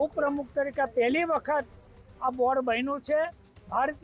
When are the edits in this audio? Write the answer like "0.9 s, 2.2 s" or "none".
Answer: none

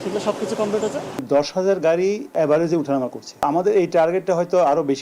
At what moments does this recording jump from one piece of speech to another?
1.2 s, 2.3 s, 3.4 s

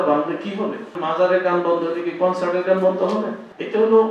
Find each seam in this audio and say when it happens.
0.9 s

